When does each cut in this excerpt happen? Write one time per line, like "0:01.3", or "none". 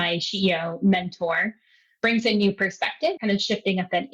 0:03.1